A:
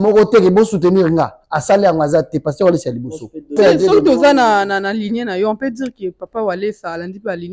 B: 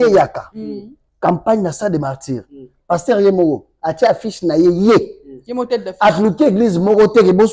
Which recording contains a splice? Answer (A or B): A